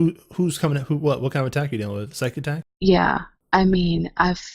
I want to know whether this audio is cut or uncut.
cut